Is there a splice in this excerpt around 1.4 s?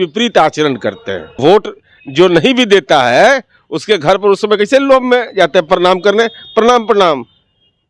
yes; 1 cut; at 1.4 s

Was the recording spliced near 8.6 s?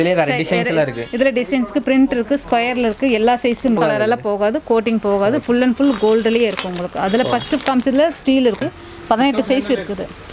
yes; 2 cuts; at 3.8 s, 8.6 s

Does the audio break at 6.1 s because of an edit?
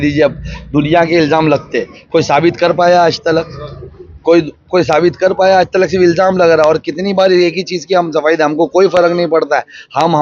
no; 0 cuts

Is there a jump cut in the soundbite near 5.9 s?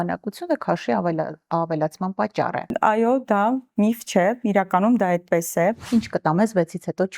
yes; 1 cut; at 5.9 s

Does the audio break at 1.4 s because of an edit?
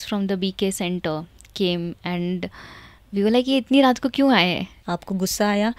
no; 1 cut; at 4.7 s

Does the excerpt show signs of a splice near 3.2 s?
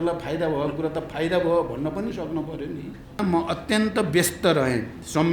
yes; 1 cut; at 3.2 s

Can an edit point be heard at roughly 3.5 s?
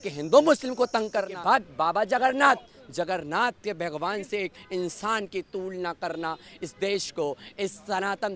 no; 1 cut; at 1.3 s

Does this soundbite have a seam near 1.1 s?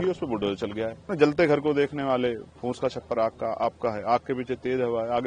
yes; 1 cut; at 1.1 s

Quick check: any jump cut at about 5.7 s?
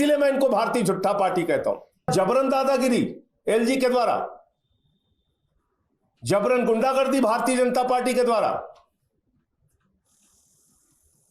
no; 1 cut; at 2.1 s

